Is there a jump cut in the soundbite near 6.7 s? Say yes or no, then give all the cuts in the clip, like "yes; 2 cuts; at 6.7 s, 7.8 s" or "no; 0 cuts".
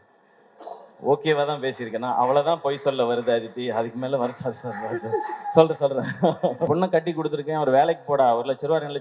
yes; 1 cut; at 6.7 s